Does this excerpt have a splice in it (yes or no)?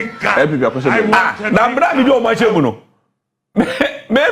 yes